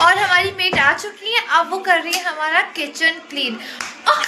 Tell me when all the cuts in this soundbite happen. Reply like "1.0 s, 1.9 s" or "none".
none